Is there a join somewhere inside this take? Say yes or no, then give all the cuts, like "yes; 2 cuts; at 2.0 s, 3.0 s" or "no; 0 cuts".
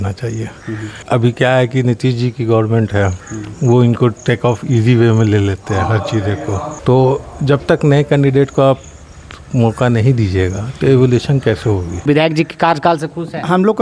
yes; 3 cuts; at 0.9 s, 6.7 s, 12.1 s